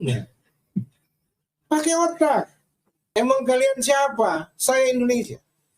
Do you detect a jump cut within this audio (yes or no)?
yes